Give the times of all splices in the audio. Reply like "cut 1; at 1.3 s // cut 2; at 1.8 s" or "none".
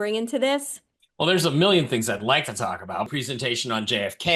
cut 1; at 3.1 s

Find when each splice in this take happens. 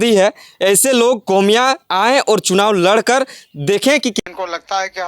cut 1; at 4.1 s

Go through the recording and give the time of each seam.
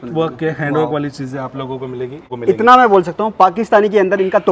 cut 1; at 2.2 s

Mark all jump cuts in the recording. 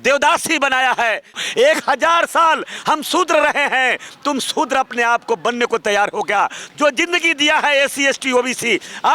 cut 1; at 1.3 s // cut 2; at 6.6 s

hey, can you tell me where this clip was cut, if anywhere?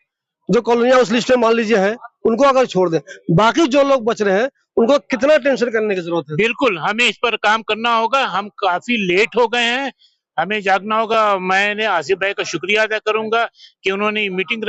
none

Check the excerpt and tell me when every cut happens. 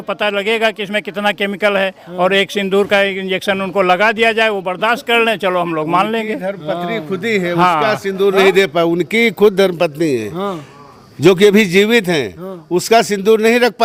none

